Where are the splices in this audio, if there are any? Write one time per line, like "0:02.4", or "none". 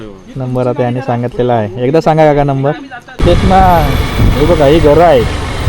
0:03.2